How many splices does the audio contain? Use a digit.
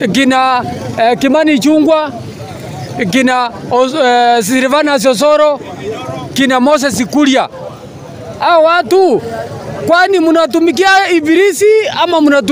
0